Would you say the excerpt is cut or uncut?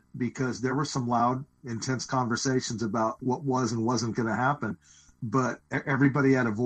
cut